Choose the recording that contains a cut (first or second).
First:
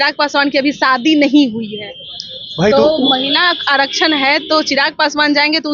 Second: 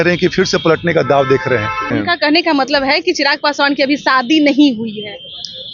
second